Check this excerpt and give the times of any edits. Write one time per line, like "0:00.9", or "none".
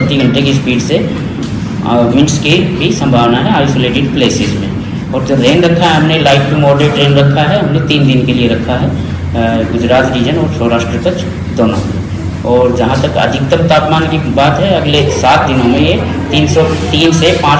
none